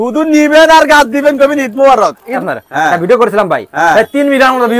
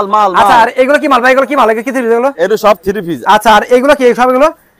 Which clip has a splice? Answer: first; 1 cut; at 2.4 s

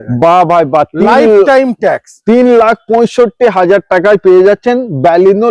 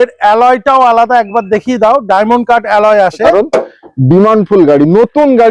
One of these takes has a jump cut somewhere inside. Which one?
second; 1 cut; at 3.3 s

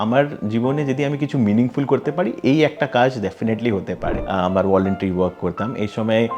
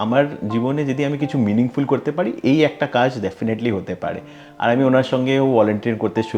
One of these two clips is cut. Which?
first; 1 cut; at 4.1 s

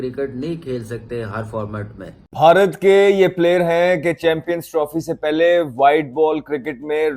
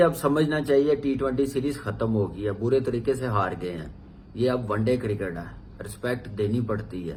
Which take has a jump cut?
first; 1 cut; at 2.2 s

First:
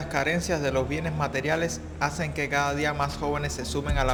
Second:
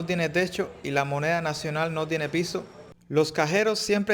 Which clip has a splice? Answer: second; 1 cut; at 2.8 s

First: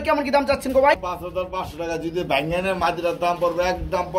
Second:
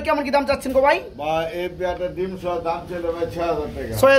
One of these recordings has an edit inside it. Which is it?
first; 1 cut; at 1.0 s

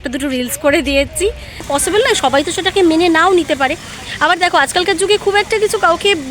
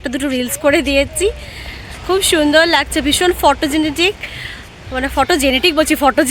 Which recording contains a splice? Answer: first; 1 cut; at 1.7 s

